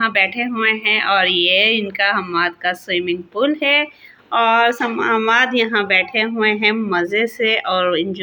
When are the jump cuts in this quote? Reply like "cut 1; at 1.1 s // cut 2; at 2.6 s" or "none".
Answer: none